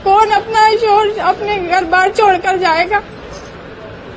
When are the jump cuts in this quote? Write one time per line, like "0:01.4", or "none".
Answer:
none